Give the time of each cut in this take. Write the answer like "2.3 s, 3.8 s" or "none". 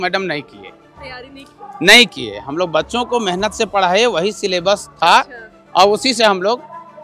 none